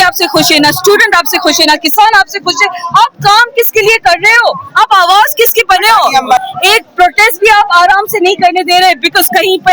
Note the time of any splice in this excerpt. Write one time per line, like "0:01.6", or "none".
0:06.5